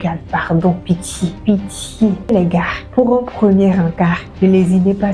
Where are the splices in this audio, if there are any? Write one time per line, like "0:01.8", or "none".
0:01.4
0:02.3